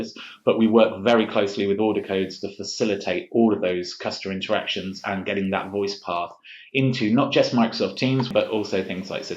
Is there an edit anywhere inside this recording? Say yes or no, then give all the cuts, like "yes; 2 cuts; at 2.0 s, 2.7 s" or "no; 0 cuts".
yes; 1 cut; at 8.3 s